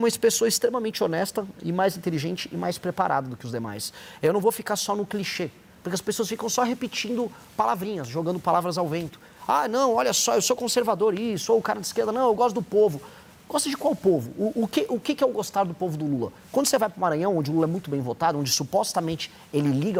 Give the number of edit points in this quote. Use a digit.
0